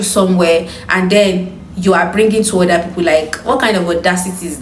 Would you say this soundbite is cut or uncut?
uncut